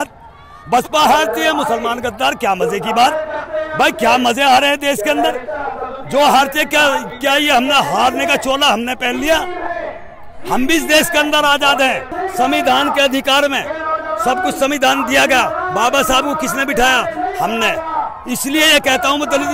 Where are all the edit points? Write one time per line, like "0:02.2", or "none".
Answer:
0:12.1